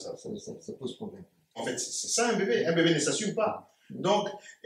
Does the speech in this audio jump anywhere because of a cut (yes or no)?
yes